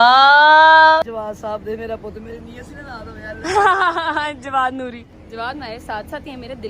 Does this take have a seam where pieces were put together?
yes; 2 cuts; at 1.0 s, 5.1 s

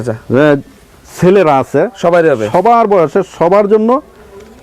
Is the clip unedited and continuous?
yes; 0 cuts

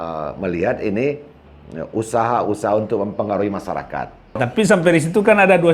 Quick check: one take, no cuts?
no; 1 cut; at 4.3 s

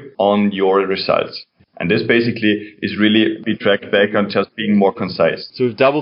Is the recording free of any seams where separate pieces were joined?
no; 1 cut; at 1.4 s

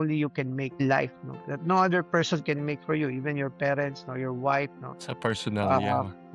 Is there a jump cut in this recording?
no; 0 cuts

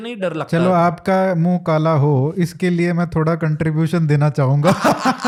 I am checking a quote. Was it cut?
no; 0 cuts

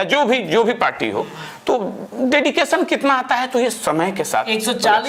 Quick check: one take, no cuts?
yes; 0 cuts

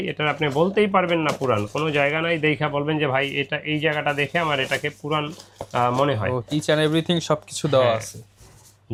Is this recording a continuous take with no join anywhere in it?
yes; 0 cuts

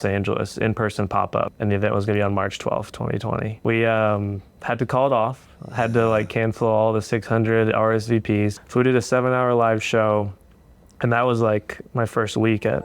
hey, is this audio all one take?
no; 3 cuts; at 1.5 s, 3.5 s, 8.6 s

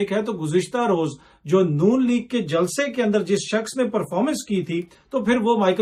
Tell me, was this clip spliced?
no; 0 cuts

